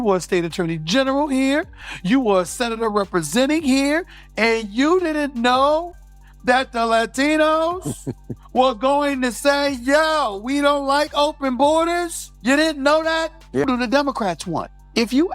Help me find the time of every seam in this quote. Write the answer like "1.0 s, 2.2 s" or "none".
13.7 s